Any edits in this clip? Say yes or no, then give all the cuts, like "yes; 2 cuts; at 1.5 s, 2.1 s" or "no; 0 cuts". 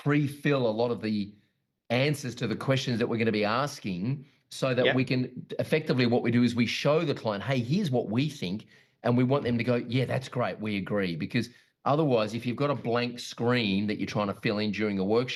no; 0 cuts